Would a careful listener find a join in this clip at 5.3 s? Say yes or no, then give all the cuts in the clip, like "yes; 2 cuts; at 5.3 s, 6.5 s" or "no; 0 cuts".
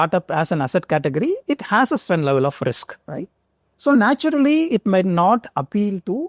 no; 0 cuts